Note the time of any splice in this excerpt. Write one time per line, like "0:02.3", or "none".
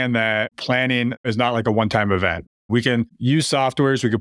0:00.9